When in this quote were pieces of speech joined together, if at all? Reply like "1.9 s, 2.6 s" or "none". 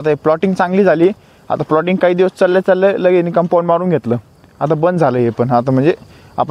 none